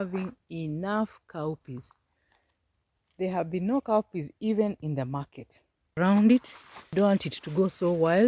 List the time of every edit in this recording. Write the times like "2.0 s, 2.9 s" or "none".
5.9 s, 6.9 s